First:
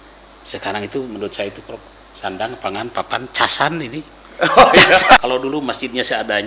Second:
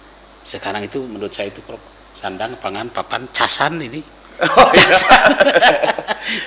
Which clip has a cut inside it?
first; 1 cut; at 5.2 s

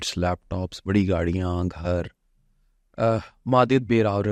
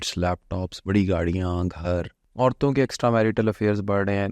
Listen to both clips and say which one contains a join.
second; 1 cut; at 2.2 s

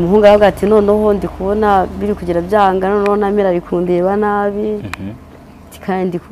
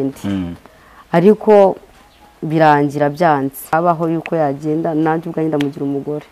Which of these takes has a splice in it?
second; 1 cut; at 3.7 s

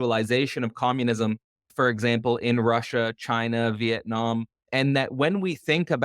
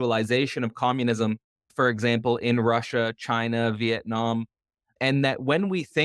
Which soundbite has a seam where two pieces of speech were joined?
first; 1 cut; at 4.6 s

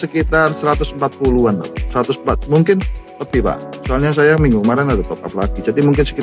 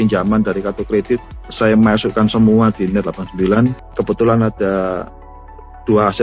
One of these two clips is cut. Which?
second; 1 cut; at 3.8 s

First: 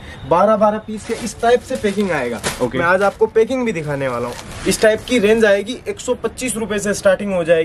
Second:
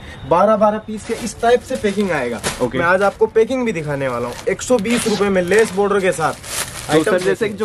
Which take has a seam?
first; 1 cut; at 4.3 s

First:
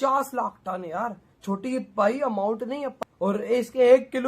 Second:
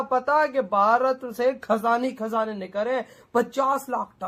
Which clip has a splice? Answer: first; 1 cut; at 2.9 s

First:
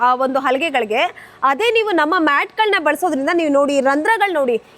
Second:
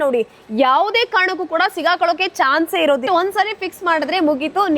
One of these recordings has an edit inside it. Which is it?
second; 1 cut; at 3.0 s

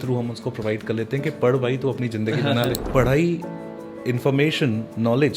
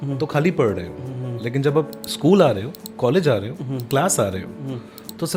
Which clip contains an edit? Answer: first; 1 cut; at 2.8 s

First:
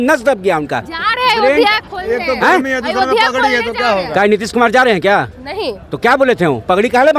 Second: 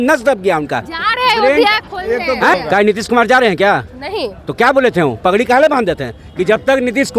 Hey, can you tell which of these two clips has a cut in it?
second; 1 cut; at 2.5 s

